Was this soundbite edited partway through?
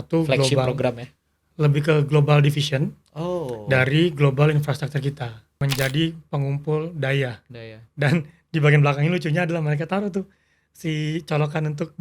yes; 2 cuts; at 1.5 s, 5.6 s

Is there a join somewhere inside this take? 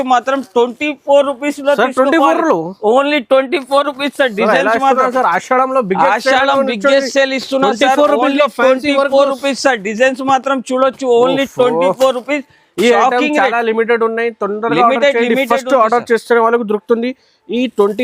no; 0 cuts

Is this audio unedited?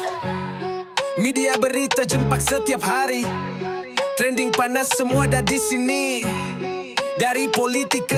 yes; 0 cuts

